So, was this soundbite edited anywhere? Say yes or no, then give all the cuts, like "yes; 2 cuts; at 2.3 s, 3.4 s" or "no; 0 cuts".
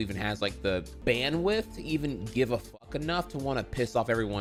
no; 0 cuts